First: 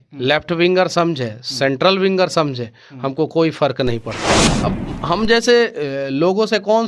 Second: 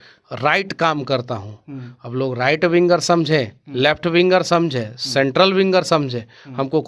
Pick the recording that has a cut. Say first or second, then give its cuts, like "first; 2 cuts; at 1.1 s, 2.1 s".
first; 1 cut; at 4.5 s